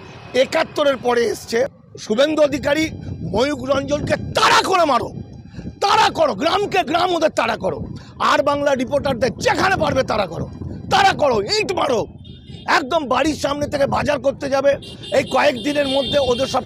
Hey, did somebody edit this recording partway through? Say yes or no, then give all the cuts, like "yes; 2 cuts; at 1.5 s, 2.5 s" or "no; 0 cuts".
yes; 1 cut; at 1.9 s